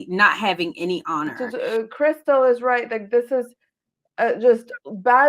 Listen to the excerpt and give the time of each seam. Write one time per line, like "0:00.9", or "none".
0:01.4

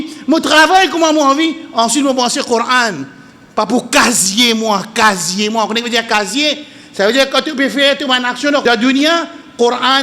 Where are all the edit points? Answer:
0:08.6

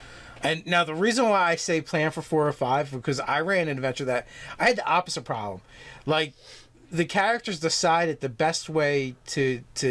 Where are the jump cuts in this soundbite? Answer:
none

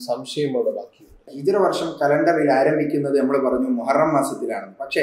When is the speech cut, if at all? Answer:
0:01.3

